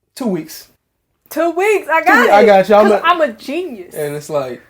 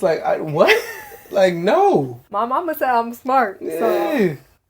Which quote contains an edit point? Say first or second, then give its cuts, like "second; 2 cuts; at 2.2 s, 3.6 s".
second; 1 cut; at 2.2 s